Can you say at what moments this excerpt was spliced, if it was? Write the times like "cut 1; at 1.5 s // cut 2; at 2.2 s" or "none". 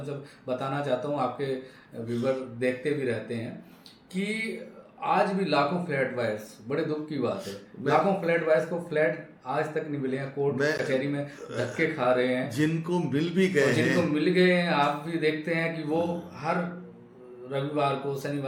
none

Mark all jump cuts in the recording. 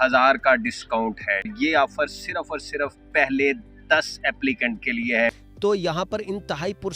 cut 1; at 1.5 s // cut 2; at 5.5 s

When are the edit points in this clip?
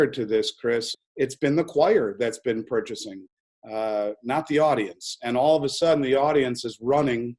cut 1; at 0.9 s

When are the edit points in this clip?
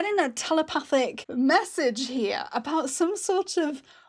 cut 1; at 1.2 s

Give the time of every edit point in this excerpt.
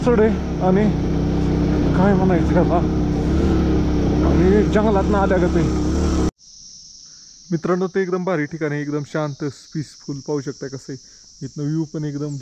cut 1; at 6.3 s

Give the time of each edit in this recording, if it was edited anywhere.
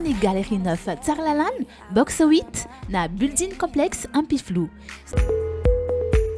cut 1; at 5.1 s

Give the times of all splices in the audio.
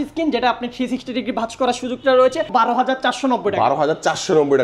cut 1; at 2.5 s

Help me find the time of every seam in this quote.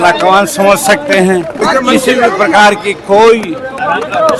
cut 1; at 1.6 s

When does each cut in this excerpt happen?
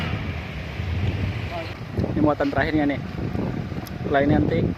cut 1; at 1.8 s

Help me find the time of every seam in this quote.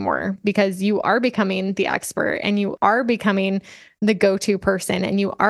cut 1; at 2.7 s

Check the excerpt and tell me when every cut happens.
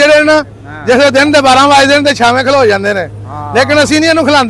none

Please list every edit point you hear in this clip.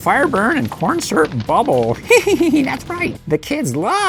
none

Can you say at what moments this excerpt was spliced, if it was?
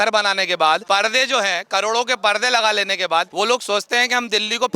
cut 1; at 0.8 s // cut 2; at 3.3 s

